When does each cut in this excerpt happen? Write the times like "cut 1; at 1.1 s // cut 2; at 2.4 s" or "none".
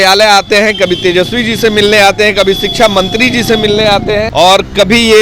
cut 1; at 4.3 s